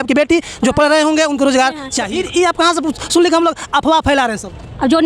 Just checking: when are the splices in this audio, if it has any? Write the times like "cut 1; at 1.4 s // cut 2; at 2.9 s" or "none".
cut 1; at 2.0 s